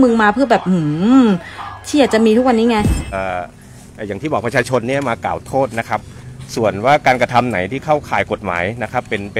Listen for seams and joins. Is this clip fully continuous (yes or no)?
no